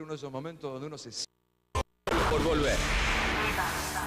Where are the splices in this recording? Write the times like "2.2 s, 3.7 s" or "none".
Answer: 1.1 s